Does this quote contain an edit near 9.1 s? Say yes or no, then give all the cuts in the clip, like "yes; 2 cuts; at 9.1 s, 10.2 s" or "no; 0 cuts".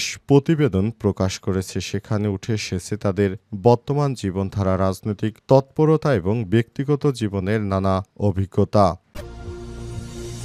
yes; 1 cut; at 9.1 s